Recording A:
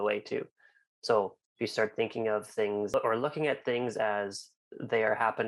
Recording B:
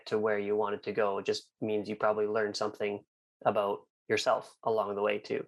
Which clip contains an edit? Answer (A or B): A